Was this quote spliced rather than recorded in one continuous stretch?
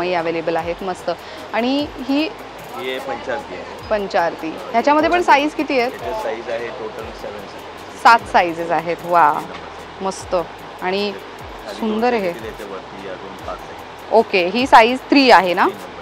no; 0 cuts

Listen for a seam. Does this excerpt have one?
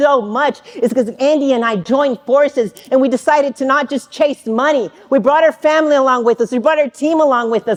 no; 0 cuts

